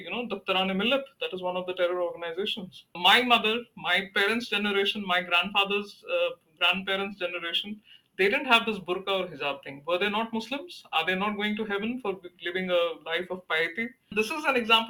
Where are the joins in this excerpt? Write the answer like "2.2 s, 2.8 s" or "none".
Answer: 3.0 s, 14.1 s